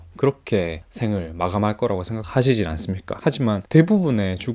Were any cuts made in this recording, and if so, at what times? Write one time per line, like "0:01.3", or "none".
none